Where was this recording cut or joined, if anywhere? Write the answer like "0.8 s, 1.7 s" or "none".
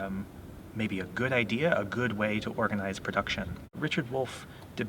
3.8 s